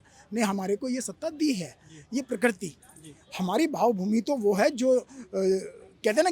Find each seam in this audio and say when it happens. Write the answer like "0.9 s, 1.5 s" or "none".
none